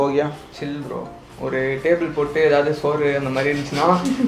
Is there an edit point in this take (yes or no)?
no